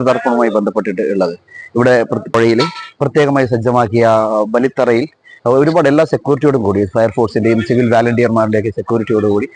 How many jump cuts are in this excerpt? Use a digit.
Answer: 1